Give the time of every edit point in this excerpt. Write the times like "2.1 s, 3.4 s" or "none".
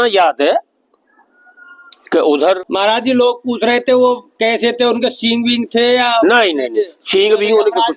2.6 s